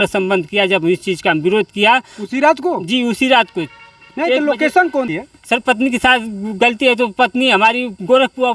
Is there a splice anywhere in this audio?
yes; 1 cut; at 5.1 s

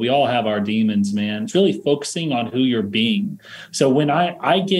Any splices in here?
yes; 1 cut; at 1.4 s

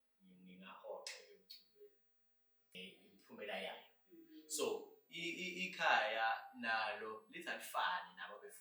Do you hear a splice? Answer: yes; 1 cut; at 2.8 s

